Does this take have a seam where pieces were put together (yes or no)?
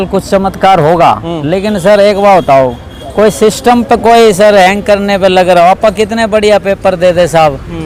no